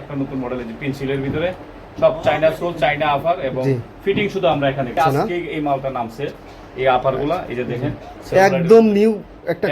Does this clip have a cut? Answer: yes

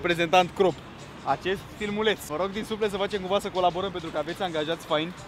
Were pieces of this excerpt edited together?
no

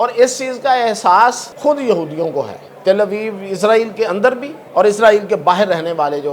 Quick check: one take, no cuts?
no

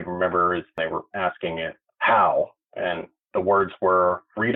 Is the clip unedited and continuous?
yes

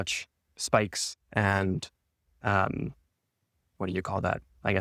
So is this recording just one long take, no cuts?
yes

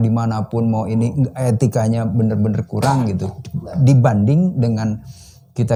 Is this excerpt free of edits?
yes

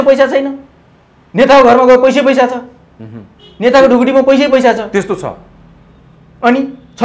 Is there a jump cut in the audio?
no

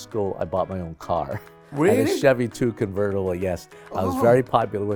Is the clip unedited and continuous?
yes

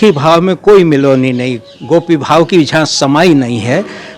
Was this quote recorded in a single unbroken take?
yes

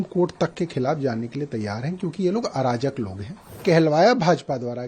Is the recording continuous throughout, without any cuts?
no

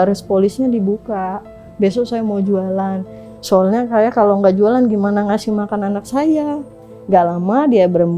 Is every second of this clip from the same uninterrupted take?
no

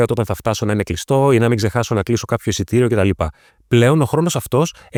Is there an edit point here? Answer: no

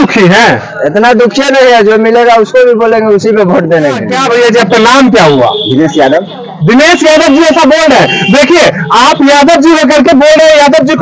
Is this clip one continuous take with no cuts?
no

